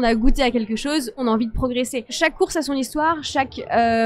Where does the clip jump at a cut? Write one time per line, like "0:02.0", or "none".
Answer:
0:01.2
0:02.1